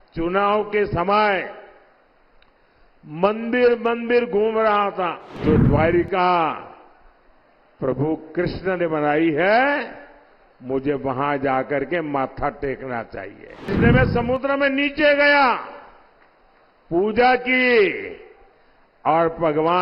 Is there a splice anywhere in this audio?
yes; 2 cuts; at 5.4 s, 13.7 s

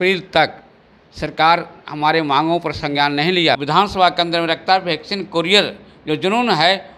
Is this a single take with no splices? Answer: no; 1 cut; at 3.6 s

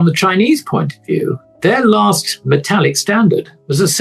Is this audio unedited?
no; 1 cut; at 1.4 s

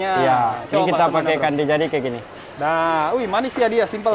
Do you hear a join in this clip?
no; 0 cuts

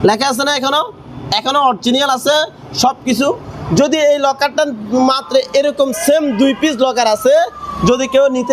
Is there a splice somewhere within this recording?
no; 0 cuts

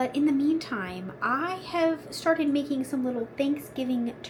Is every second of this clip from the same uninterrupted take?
yes; 0 cuts

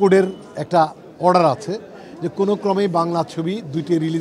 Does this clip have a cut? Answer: no; 0 cuts

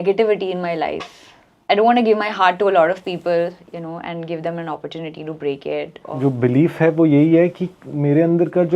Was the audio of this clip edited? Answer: yes; 2 cuts; at 1.5 s, 6.0 s

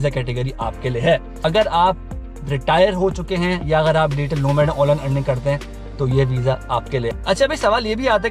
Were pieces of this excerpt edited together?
yes; 2 cuts; at 1.3 s, 7.1 s

